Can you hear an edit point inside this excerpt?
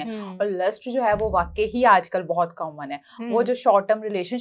no; 0 cuts

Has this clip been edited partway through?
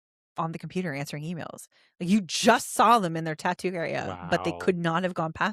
no; 0 cuts

